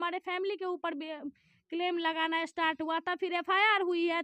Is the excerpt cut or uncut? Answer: uncut